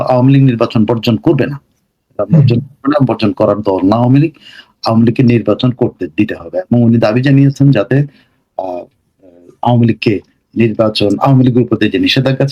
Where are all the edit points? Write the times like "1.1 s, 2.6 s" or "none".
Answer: none